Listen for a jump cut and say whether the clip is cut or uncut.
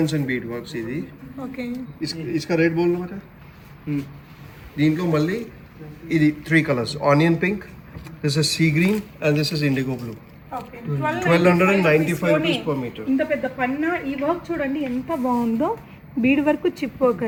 uncut